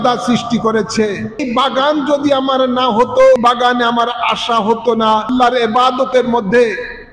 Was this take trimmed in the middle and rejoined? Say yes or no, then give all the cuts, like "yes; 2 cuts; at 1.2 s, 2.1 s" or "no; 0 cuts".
yes; 3 cuts; at 1.4 s, 3.4 s, 5.3 s